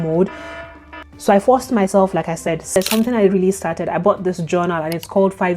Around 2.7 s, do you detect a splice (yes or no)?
yes